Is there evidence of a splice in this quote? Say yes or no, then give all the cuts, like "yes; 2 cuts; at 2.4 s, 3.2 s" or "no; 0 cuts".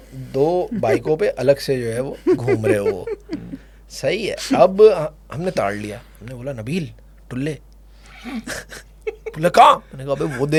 no; 0 cuts